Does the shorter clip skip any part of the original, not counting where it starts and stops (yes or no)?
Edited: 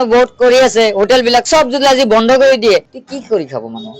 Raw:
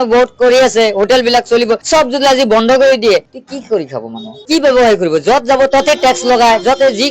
yes